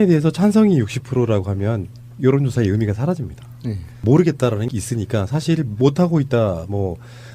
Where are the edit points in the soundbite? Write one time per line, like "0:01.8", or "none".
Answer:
0:02.8